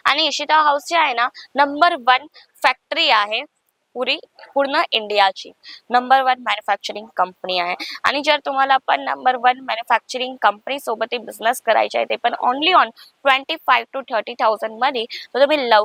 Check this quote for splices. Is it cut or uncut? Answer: uncut